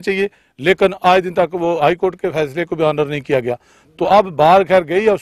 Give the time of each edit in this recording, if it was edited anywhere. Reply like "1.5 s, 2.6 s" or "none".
none